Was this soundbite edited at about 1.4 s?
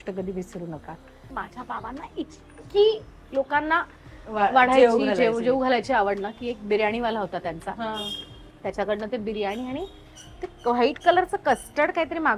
yes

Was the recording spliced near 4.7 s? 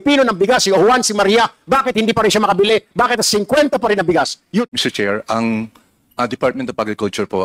yes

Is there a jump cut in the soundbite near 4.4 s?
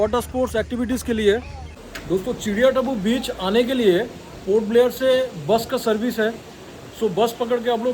no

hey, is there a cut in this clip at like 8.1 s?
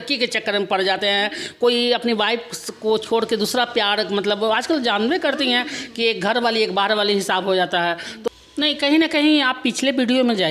yes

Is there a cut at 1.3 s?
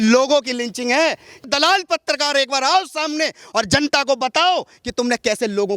yes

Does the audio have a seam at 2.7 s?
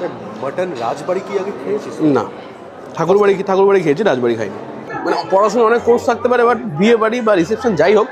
no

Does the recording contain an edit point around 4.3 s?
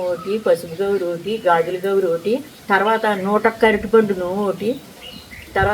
no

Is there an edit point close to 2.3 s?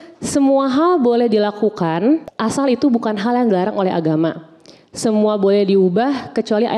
yes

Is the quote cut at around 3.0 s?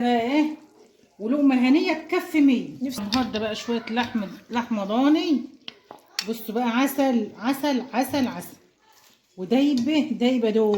yes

